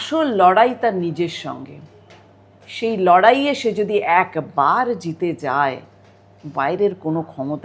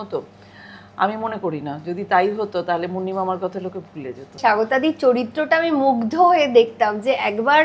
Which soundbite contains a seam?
second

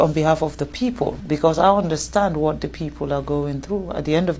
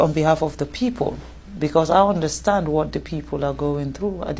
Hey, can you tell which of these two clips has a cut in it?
first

